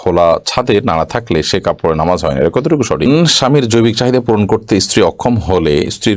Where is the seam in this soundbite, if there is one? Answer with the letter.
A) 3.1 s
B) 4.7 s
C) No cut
A